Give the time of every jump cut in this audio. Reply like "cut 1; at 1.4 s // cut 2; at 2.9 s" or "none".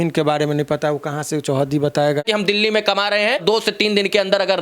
cut 1; at 2.2 s // cut 2; at 3.4 s